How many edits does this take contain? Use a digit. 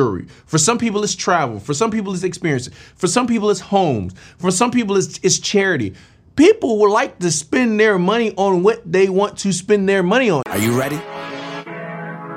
1